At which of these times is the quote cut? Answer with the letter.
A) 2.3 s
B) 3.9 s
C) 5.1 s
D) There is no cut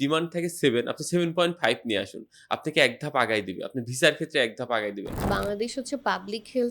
C